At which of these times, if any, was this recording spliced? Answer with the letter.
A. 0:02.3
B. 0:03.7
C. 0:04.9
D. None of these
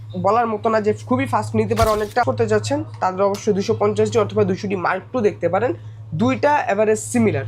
A